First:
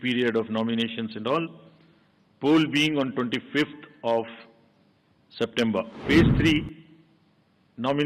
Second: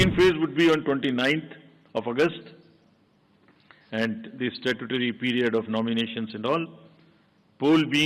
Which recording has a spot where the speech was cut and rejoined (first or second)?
first